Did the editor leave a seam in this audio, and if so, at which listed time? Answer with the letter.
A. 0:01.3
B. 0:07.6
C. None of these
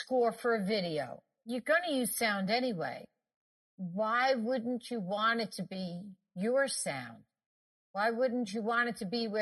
A